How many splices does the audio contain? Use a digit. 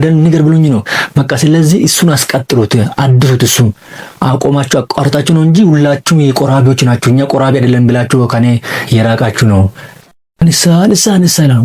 1